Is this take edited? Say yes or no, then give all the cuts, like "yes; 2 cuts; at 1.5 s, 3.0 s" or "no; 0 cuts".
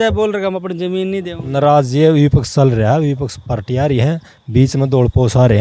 no; 0 cuts